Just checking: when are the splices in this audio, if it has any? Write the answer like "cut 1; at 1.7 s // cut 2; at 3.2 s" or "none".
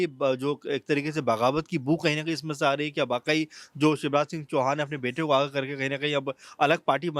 none